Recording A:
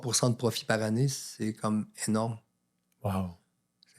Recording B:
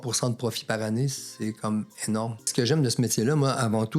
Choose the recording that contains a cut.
B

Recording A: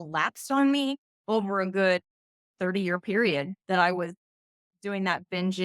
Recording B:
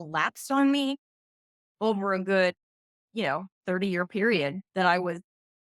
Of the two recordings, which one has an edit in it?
A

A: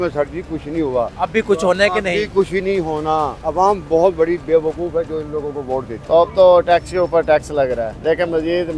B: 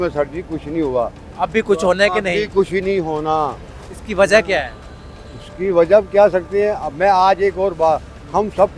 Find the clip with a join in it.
A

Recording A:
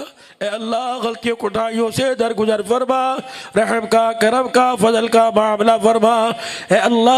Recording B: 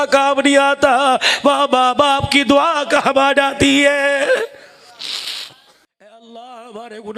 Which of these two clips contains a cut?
B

